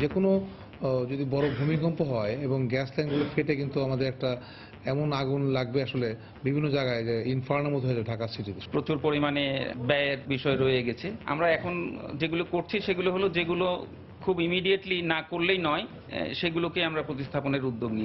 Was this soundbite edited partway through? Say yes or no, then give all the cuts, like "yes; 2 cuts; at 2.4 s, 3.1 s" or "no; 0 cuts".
yes; 3 cuts; at 8.5 s, 9.7 s, 11.1 s